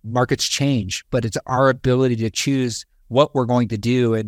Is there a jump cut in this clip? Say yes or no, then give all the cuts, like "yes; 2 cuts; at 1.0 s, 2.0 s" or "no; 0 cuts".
no; 0 cuts